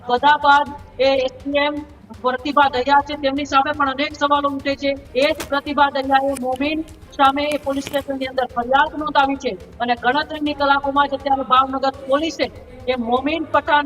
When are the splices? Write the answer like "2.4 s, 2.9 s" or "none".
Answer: 5.0 s